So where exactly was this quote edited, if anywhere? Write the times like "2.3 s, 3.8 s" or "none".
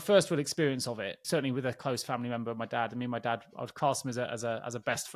1.1 s